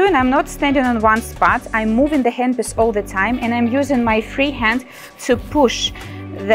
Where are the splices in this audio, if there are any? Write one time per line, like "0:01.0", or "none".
none